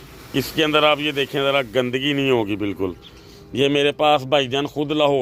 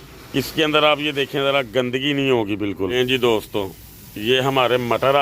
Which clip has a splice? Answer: second; 1 cut; at 2.9 s

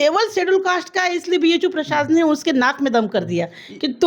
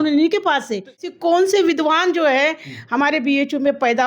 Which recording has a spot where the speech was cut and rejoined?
second; 1 cut; at 1.1 s

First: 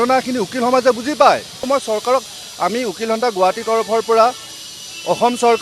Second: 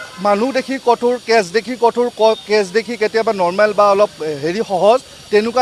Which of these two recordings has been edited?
first; 1 cut; at 1.6 s

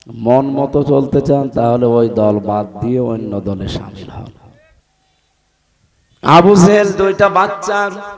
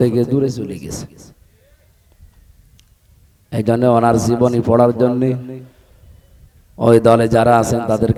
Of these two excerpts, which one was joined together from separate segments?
first; 1 cut; at 4.9 s

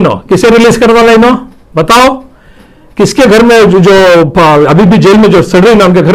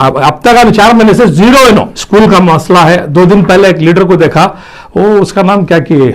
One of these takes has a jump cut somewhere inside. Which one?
second; 1 cut; at 2.0 s

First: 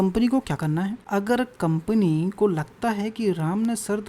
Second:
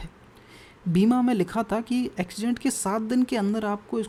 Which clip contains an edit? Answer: first; 1 cut; at 1.0 s

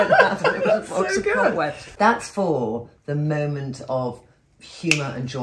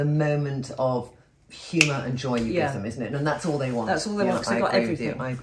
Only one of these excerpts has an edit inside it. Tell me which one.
first; 1 cut; at 1.8 s

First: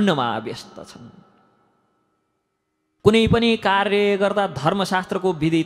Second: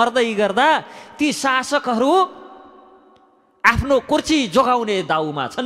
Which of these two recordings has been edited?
first; 1 cut; at 3.0 s

